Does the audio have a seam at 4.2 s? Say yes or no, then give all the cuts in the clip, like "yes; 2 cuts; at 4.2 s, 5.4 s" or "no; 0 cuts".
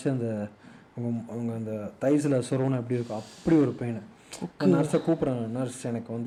no; 0 cuts